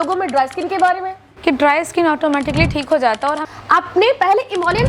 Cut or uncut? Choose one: cut